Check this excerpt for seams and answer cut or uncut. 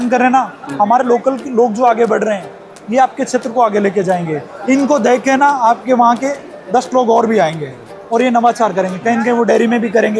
uncut